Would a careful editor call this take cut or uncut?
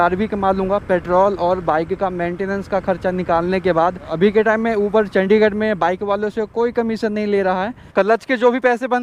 cut